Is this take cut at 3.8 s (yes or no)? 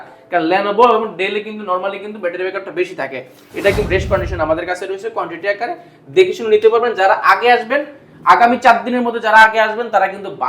yes